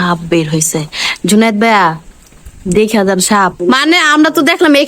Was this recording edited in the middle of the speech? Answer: yes; 1 cut; at 3.6 s

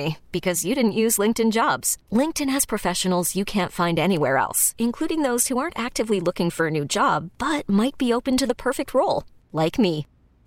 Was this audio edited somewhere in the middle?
no; 0 cuts

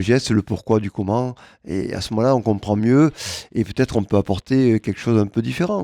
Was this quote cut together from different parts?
no; 0 cuts

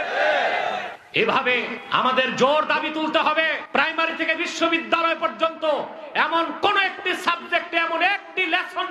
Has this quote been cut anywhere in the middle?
yes; 3 cuts; at 1.0 s, 1.8 s, 3.6 s

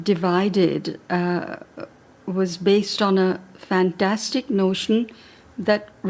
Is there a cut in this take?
yes; 1 cut; at 3.4 s

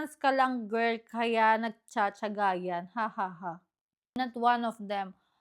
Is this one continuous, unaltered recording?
no; 1 cut; at 4.1 s

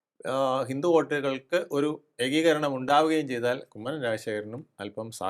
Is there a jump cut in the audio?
no; 0 cuts

